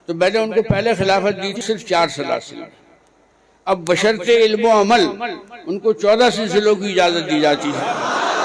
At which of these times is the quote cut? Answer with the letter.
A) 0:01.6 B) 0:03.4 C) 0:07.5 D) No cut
A